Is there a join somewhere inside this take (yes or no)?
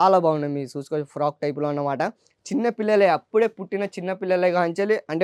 no